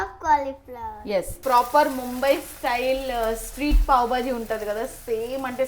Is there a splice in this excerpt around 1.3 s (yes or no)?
yes